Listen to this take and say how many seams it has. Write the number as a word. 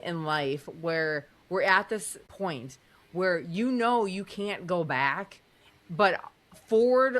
one